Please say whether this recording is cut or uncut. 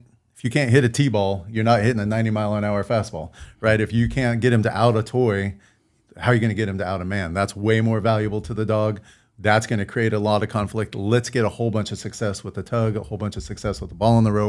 uncut